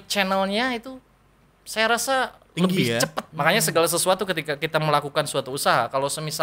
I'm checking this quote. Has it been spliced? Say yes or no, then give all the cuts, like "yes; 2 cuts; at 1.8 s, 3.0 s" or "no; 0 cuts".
yes; 1 cut; at 3.2 s